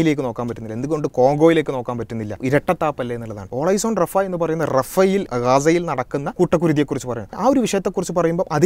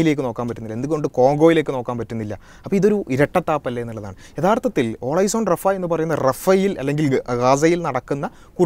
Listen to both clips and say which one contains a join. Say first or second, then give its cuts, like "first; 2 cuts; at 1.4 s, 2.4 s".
first; 5 cuts; at 2.4 s, 3.5 s, 5.3 s, 6.3 s, 7.4 s